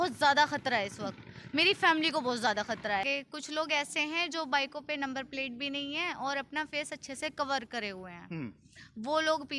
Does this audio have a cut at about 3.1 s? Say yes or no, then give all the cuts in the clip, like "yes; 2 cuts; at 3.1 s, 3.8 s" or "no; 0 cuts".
yes; 1 cut; at 3.1 s